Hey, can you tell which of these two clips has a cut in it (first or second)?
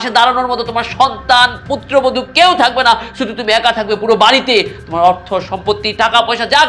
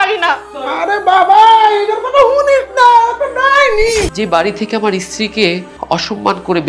second